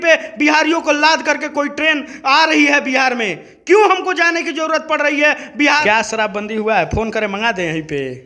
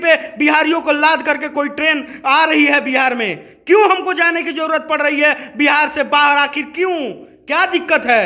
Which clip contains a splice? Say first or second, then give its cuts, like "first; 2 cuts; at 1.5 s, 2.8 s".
first; 1 cut; at 5.8 s